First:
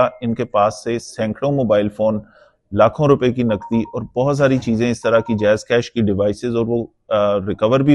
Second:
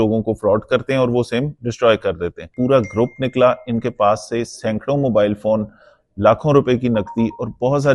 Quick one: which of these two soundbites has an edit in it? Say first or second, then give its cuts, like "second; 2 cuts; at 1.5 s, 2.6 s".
second; 1 cut; at 2.5 s